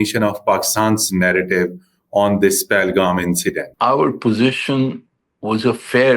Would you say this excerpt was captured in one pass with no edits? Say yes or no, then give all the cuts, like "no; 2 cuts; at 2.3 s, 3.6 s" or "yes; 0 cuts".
no; 1 cut; at 3.7 s